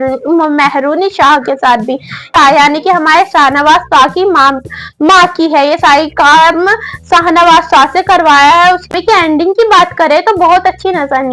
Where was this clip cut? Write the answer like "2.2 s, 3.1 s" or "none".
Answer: 2.3 s, 8.9 s

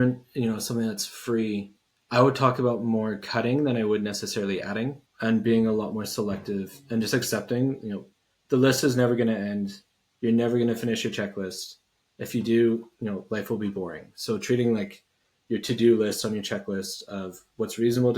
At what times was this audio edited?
5.0 s

